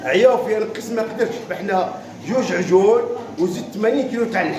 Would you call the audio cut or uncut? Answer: uncut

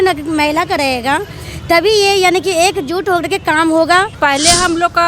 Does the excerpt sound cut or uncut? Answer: cut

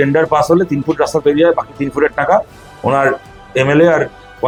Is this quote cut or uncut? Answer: uncut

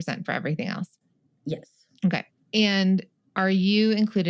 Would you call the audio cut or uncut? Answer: cut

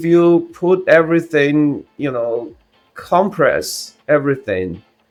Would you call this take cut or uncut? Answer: uncut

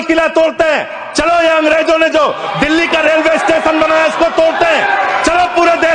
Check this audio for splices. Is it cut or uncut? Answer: uncut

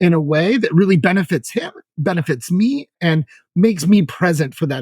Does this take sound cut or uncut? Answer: cut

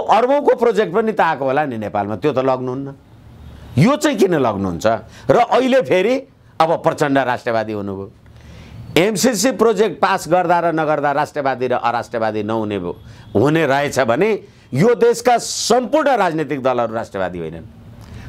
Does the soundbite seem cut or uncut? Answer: uncut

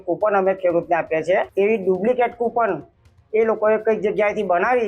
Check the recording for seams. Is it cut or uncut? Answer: cut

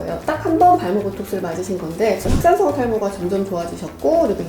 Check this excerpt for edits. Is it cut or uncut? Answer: cut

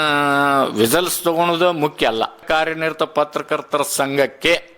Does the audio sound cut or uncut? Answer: cut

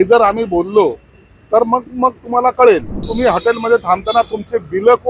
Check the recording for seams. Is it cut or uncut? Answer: cut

